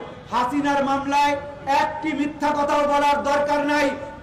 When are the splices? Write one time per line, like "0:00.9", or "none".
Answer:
none